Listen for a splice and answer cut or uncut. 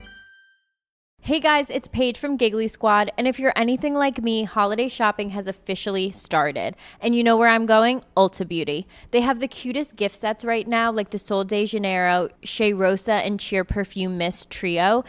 cut